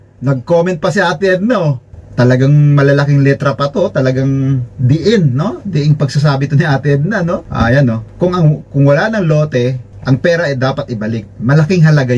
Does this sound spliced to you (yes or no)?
yes